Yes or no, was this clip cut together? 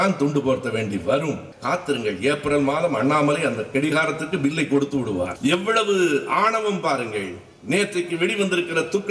yes